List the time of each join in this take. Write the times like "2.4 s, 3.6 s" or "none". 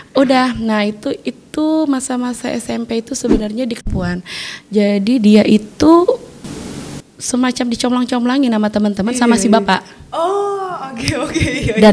3.9 s